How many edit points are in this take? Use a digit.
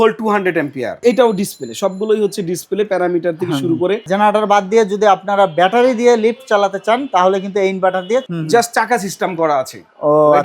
3